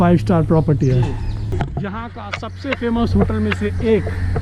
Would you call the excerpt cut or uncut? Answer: cut